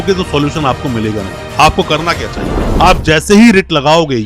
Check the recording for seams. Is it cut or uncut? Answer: cut